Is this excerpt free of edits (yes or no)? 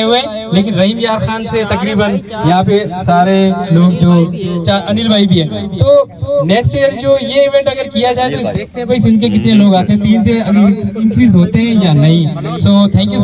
yes